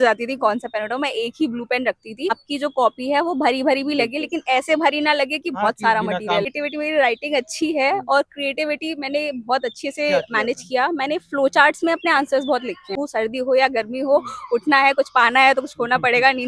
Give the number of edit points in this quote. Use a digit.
3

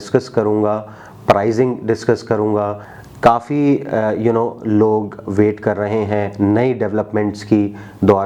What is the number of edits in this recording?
1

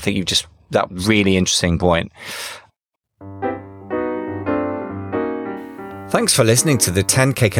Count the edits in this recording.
1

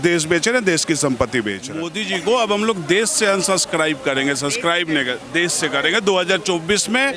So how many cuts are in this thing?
1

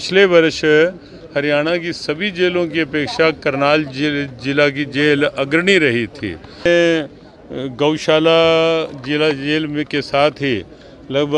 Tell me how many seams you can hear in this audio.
1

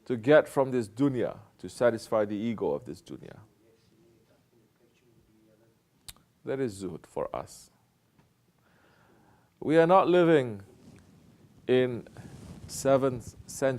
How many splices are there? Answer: 1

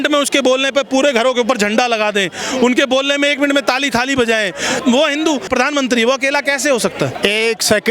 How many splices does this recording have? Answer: 3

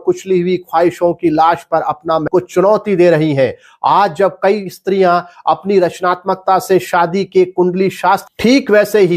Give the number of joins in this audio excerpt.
2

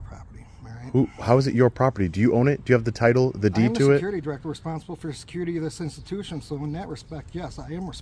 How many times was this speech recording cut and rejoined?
0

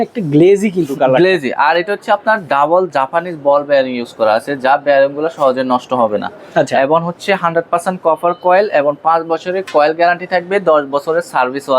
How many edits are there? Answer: 0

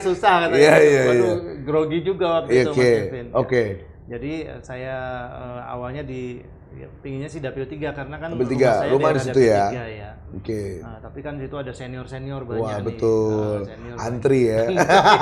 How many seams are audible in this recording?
0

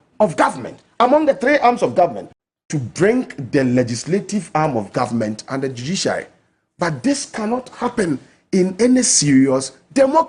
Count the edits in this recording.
1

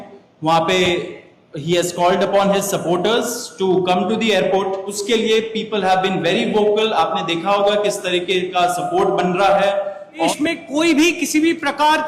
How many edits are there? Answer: 2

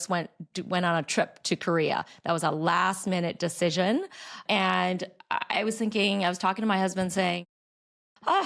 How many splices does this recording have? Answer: 0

